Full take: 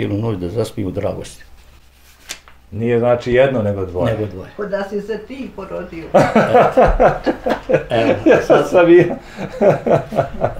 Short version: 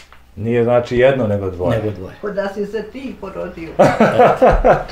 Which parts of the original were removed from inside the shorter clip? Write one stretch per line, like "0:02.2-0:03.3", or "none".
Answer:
none